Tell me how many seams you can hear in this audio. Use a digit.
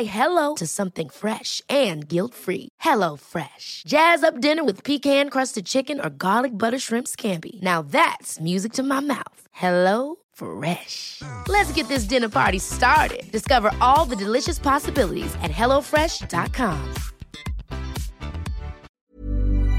1